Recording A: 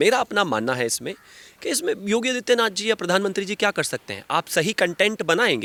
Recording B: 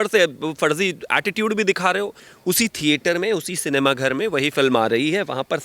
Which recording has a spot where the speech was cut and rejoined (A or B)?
B